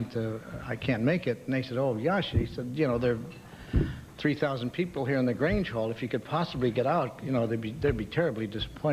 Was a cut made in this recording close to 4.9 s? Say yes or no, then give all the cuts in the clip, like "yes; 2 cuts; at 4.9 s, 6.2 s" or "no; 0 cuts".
yes; 1 cut; at 4.9 s